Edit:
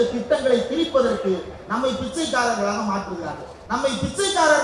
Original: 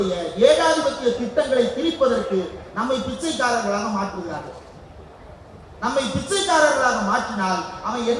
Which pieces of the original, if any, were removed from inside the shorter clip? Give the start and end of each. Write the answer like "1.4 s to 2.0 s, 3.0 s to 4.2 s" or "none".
4.6 s to 5.6 s